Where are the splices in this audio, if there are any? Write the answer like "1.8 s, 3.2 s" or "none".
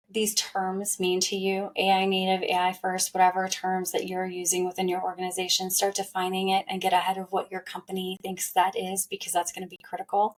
none